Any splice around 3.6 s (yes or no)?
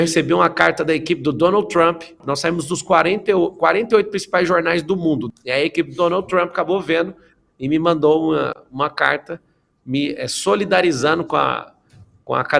no